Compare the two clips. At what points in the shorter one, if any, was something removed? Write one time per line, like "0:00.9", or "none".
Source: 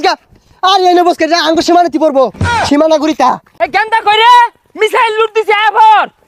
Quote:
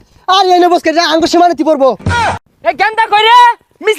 0:02.4